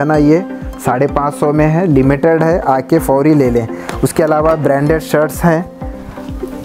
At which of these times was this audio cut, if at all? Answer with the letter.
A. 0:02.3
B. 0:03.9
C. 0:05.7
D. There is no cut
D